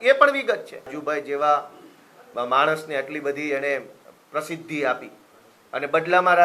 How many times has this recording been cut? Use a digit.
1